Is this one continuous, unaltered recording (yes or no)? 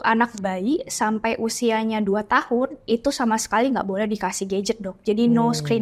yes